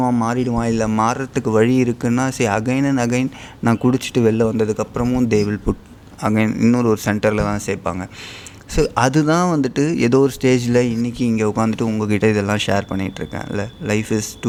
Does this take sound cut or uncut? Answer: uncut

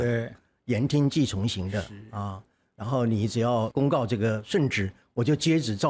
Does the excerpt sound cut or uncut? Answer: cut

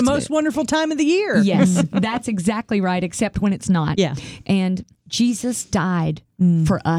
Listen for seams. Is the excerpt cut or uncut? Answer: cut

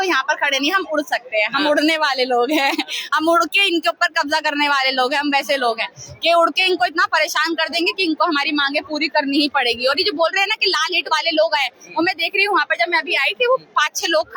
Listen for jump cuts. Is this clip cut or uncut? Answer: uncut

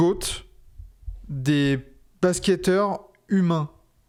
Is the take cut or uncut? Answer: uncut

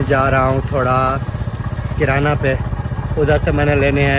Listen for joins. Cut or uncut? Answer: uncut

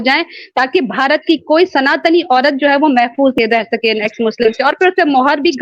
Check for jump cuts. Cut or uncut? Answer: cut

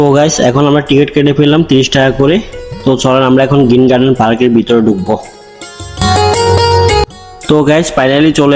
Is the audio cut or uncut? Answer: uncut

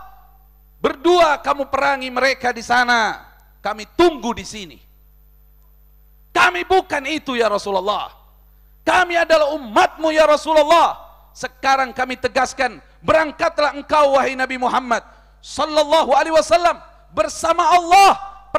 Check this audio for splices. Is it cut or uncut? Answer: uncut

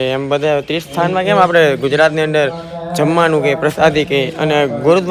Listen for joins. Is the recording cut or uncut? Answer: uncut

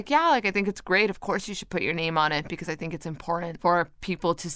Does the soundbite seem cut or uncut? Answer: cut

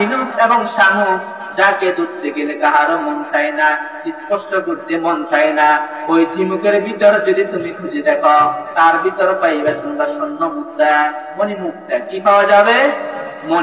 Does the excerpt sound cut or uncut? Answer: uncut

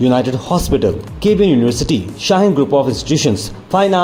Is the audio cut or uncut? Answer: uncut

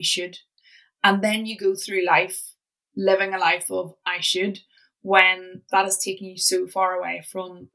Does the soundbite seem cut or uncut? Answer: uncut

